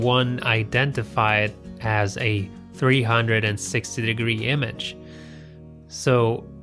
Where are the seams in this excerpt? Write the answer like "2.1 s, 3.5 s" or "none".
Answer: none